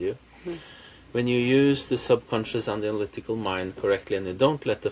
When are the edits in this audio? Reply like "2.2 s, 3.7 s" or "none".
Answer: none

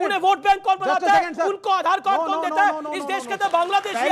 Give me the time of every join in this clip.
2.9 s

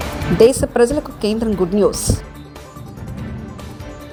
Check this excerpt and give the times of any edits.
none

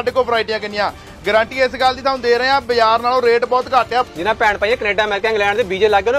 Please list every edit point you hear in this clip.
4.1 s

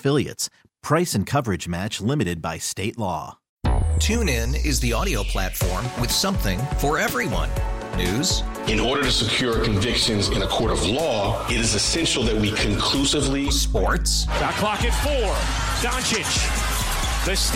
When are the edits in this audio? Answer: 3.4 s

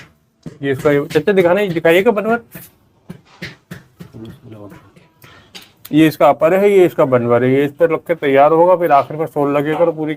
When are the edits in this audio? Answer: none

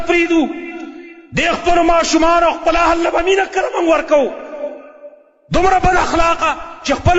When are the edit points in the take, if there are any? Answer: none

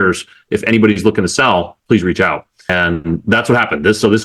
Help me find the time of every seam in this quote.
2.7 s

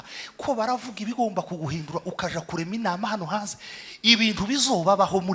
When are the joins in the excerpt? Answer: none

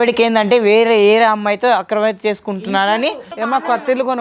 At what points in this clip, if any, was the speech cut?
3.3 s

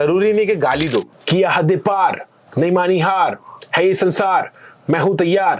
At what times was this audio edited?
1.1 s

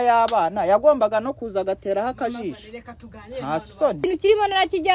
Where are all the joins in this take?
4.0 s

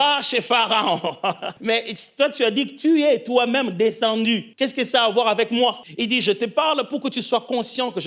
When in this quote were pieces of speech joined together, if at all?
1.5 s, 4.5 s, 5.9 s

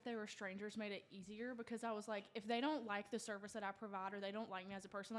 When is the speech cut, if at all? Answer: none

